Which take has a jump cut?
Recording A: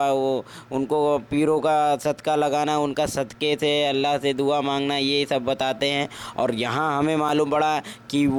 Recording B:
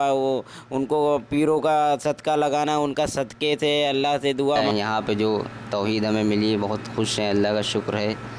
B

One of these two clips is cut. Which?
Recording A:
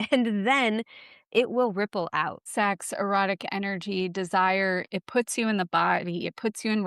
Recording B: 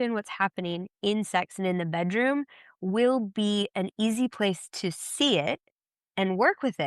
A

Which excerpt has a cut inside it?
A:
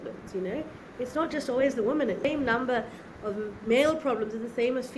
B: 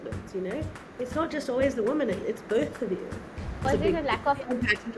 B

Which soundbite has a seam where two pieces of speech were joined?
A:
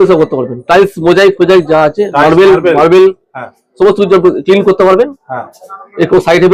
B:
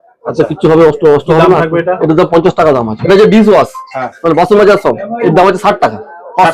B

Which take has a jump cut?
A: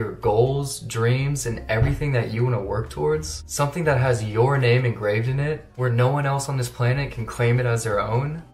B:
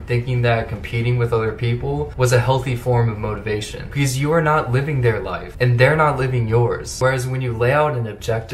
B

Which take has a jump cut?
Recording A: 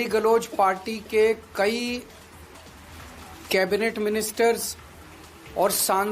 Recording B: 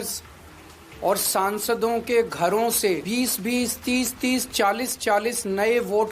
B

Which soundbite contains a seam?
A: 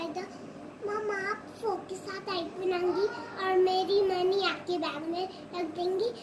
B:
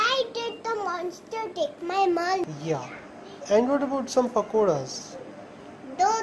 B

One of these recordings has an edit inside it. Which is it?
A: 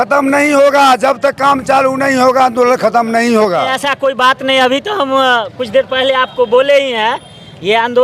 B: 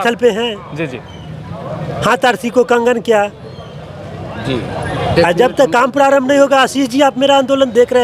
A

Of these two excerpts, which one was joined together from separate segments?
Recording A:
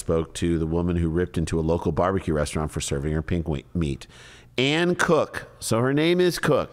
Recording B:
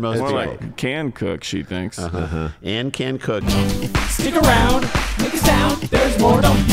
B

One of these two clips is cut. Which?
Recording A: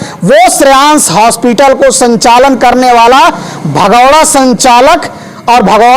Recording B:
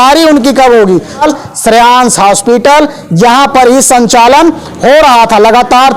B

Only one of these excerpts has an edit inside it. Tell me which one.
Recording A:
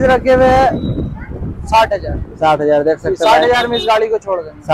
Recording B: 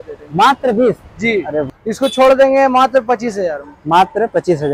B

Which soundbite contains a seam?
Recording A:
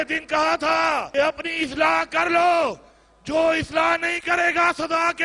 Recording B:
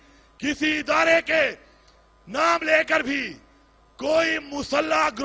A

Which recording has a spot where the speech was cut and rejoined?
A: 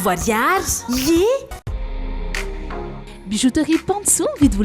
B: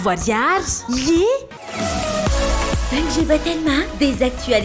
B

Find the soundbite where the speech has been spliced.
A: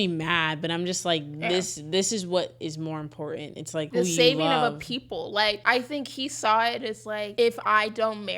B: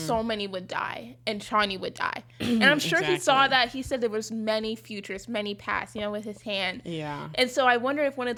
A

